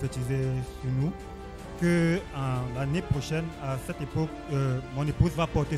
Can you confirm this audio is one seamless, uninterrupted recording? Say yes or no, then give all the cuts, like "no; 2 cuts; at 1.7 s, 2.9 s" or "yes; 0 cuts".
no; 1 cut; at 1.6 s